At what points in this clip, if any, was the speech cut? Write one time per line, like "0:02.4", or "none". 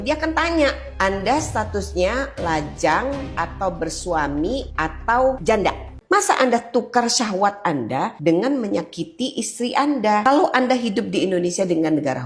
0:05.9
0:10.2